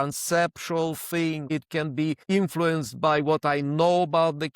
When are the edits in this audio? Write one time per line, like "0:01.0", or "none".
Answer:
0:01.4